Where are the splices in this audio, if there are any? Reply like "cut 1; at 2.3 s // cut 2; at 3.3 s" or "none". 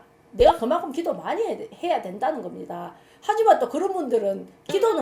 none